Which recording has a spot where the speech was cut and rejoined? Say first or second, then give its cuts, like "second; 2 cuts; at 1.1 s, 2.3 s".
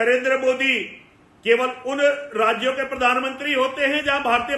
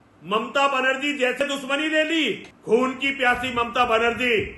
second; 2 cuts; at 1.3 s, 2.5 s